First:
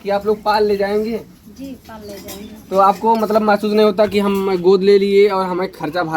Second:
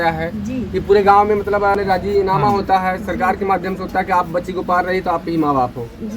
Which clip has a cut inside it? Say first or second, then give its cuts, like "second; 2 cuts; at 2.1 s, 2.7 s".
second; 1 cut; at 1.6 s